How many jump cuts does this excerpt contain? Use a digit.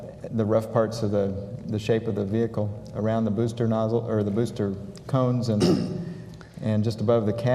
1